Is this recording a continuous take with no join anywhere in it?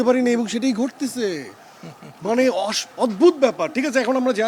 yes; 0 cuts

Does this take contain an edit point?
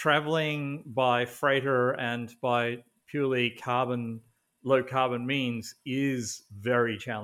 no; 0 cuts

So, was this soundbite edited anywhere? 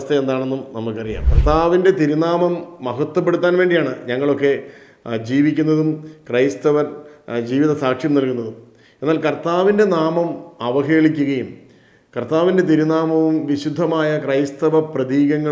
yes; 1 cut; at 1.2 s

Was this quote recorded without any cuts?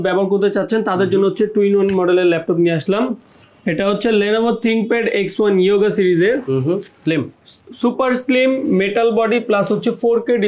yes; 0 cuts

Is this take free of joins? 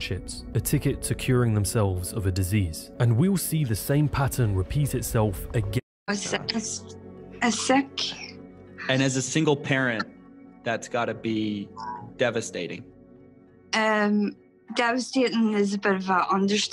yes; 0 cuts

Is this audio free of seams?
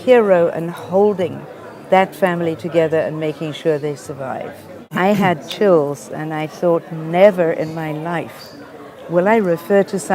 no; 1 cut; at 4.9 s

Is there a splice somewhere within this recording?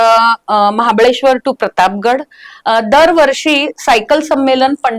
no; 0 cuts

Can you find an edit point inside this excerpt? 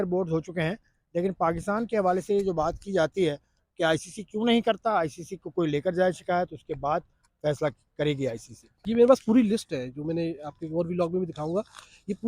yes; 1 cut; at 8.7 s

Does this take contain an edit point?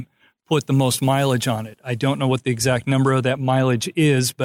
yes; 1 cut; at 3.4 s

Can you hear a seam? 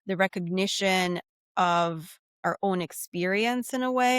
yes; 1 cut; at 2.4 s

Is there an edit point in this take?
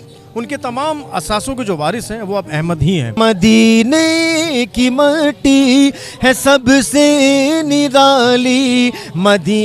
yes; 1 cut; at 3.2 s

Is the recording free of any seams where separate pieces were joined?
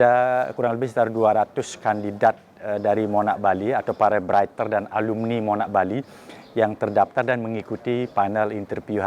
yes; 0 cuts

